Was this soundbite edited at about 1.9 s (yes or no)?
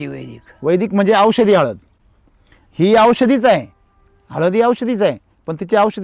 no